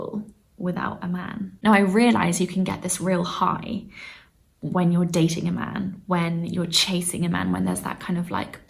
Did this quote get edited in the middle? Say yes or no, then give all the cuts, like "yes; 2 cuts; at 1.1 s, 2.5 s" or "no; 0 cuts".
yes; 1 cut; at 1.5 s